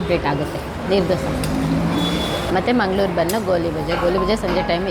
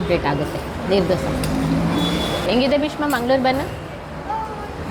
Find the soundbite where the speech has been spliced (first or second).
second